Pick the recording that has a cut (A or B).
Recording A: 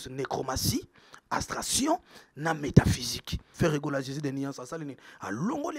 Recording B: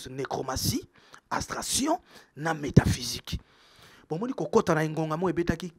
A